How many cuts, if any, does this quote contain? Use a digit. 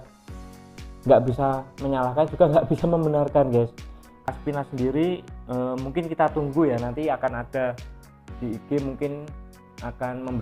1